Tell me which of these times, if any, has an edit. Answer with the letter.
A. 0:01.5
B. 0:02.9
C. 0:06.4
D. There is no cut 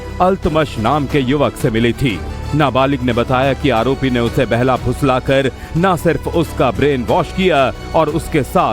A